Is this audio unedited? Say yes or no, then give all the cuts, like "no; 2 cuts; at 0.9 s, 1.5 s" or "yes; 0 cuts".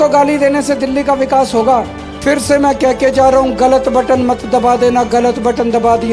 no; 1 cut; at 2.0 s